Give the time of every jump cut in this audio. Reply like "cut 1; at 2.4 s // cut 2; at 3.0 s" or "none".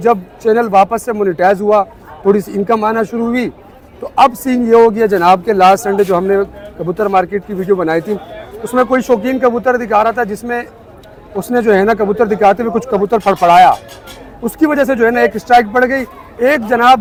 none